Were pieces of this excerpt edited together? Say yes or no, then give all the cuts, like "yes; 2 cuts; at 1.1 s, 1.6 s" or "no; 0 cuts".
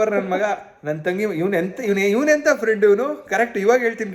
no; 0 cuts